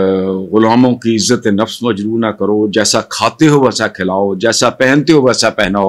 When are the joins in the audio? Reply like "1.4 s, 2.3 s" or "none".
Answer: none

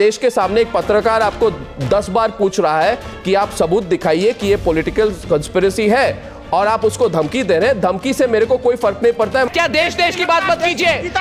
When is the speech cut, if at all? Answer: 9.5 s

